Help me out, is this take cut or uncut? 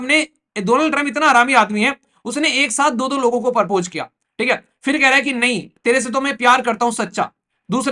uncut